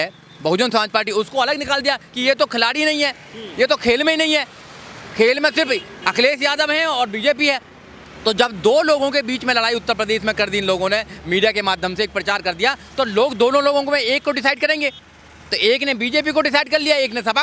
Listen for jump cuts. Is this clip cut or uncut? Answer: uncut